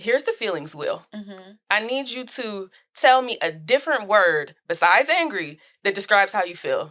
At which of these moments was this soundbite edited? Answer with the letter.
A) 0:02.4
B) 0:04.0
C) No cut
C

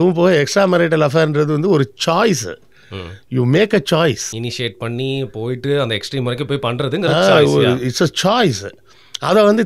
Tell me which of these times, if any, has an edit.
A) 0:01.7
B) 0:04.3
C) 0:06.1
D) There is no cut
B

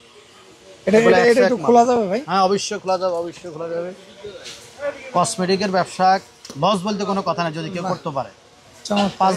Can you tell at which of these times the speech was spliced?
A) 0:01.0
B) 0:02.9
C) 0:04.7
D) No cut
D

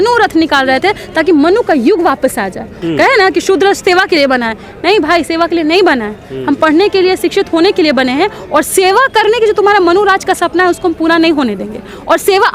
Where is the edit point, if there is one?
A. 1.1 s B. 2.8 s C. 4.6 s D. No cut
B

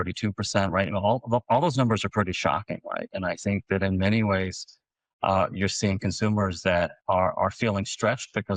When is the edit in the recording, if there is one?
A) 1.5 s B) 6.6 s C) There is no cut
C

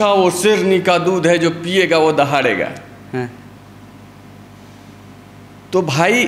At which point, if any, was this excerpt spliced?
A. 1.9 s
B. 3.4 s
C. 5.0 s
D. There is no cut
D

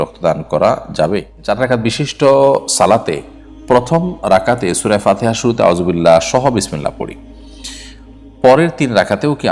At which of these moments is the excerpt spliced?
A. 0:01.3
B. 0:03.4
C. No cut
A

